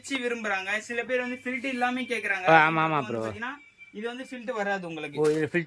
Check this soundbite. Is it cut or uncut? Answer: uncut